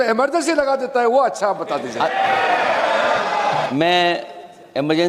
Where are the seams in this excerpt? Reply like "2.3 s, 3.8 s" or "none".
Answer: 3.7 s